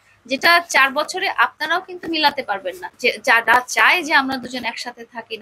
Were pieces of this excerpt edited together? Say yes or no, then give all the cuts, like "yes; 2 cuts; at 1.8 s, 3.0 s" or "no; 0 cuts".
yes; 1 cut; at 2.9 s